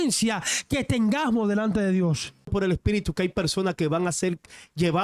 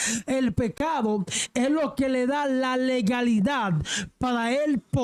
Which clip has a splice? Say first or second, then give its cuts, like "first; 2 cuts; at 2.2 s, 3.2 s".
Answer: first; 1 cut; at 2.5 s